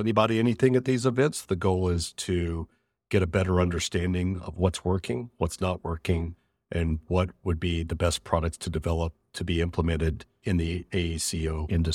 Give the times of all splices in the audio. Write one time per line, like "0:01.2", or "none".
0:11.0